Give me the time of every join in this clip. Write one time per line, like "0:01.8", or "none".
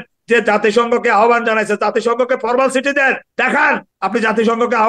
0:03.4